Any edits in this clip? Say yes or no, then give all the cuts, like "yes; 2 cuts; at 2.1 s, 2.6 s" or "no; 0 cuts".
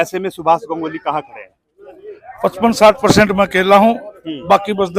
no; 0 cuts